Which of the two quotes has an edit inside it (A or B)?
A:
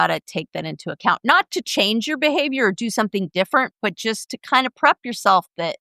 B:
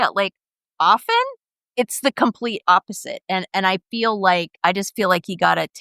B